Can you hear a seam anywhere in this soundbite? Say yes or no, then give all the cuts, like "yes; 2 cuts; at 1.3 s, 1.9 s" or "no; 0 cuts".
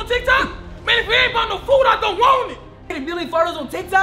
yes; 1 cut; at 2.8 s